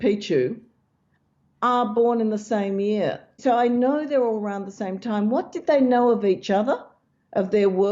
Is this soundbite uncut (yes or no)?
no